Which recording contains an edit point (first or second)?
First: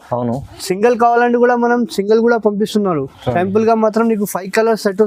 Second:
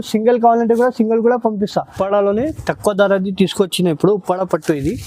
second